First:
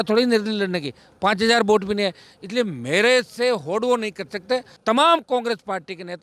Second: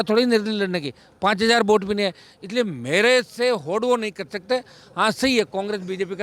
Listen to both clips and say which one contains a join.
first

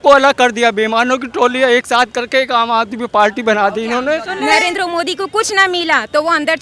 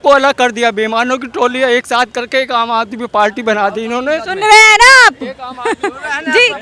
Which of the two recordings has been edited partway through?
first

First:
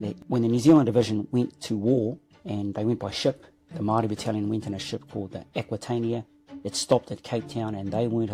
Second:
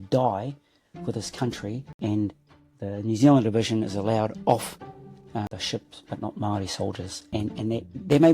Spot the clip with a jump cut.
second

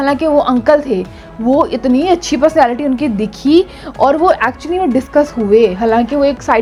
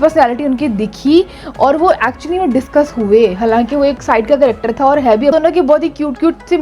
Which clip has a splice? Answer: second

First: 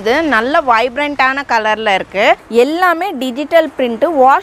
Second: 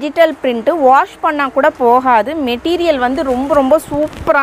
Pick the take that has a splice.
first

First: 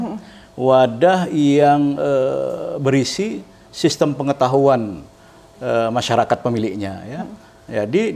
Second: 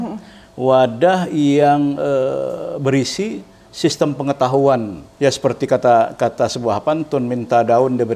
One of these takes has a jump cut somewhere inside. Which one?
second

